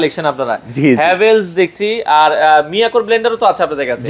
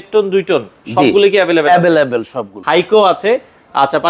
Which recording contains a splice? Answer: second; 1 cut; at 2.5 s

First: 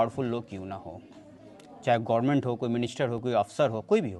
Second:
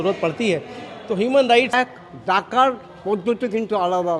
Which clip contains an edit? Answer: second; 1 cut; at 1.7 s

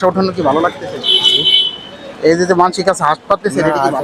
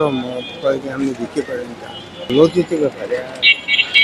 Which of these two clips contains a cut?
second; 1 cut; at 2.3 s

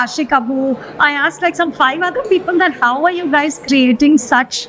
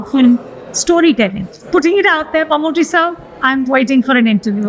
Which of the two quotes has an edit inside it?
second; 1 cut; at 1.5 s

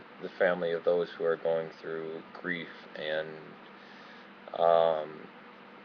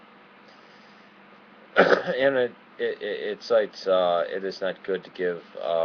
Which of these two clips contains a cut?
second; 1 cut; at 3.0 s

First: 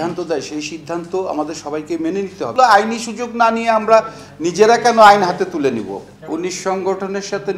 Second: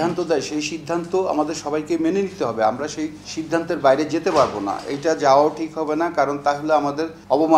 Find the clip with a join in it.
first; 2 cuts; at 2.5 s, 6.1 s

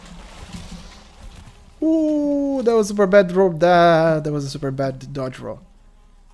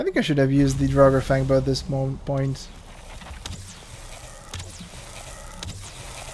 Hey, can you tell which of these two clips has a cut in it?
second; 1 cut; at 2.8 s

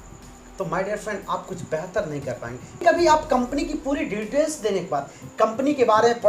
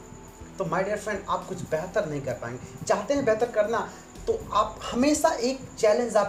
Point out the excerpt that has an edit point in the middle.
first; 1 cut; at 2.8 s

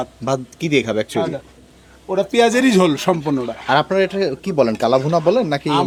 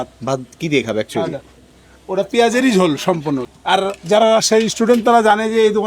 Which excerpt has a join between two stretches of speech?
second; 1 cut; at 3.5 s

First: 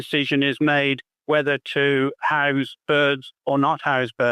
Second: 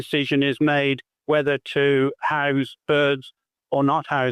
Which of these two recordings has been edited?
first; 1 cut; at 3.3 s

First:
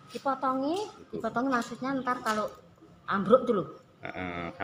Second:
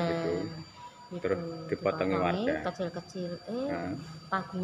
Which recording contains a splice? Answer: first; 1 cut; at 1.0 s

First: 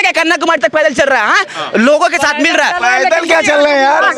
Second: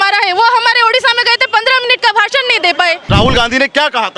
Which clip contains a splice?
second; 1 cut; at 3.0 s

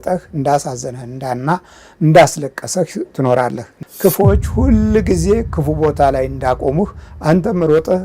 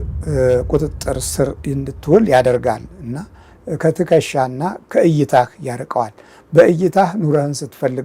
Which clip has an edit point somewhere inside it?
first; 1 cut; at 3.7 s

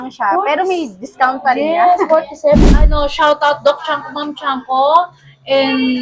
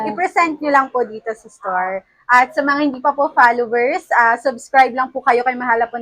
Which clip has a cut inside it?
first; 1 cut; at 2.7 s

